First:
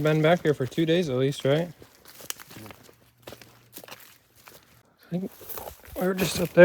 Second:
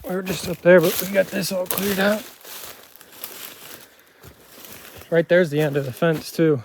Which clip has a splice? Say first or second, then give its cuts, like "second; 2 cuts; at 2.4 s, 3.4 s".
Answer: first; 1 cut; at 5.0 s